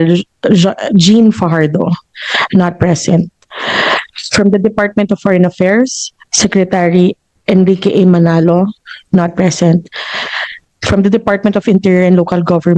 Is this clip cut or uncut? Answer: uncut